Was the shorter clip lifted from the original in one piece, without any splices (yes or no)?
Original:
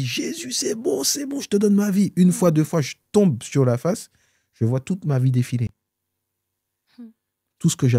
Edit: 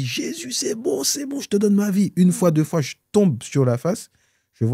yes